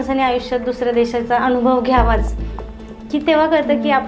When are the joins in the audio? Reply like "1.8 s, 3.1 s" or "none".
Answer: none